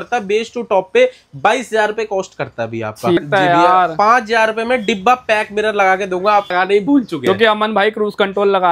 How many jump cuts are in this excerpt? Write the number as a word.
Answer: two